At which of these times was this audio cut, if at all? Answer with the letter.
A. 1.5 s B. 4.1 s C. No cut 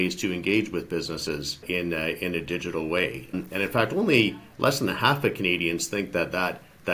A